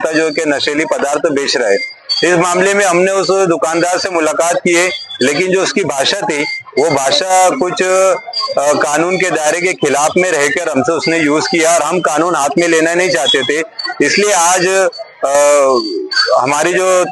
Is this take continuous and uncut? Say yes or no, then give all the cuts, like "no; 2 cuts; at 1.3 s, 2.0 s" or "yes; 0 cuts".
yes; 0 cuts